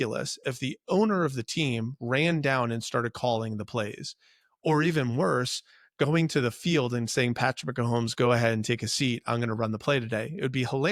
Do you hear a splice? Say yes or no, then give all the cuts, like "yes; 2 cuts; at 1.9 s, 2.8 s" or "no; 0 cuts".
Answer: no; 0 cuts